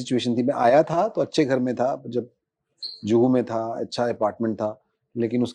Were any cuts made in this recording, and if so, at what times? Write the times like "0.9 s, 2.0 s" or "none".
none